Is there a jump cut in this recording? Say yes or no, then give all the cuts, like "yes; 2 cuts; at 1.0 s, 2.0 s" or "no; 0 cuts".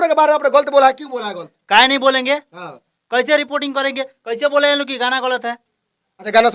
no; 0 cuts